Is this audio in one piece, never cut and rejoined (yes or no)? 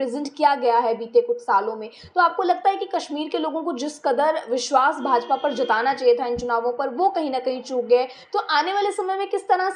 yes